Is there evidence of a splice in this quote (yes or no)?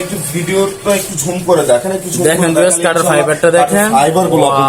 no